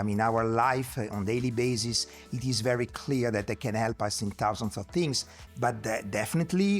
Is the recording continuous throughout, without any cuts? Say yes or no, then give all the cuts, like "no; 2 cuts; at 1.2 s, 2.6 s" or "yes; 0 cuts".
no; 1 cut; at 5.3 s